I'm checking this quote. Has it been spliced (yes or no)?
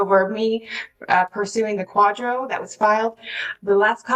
no